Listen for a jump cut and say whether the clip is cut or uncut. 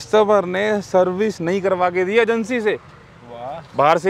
uncut